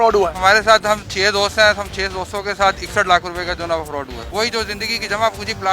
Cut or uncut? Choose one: cut